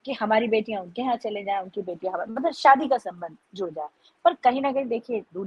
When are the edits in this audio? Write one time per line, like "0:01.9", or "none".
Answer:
none